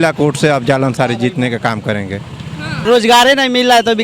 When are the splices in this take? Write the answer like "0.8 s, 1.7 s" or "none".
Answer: 2.8 s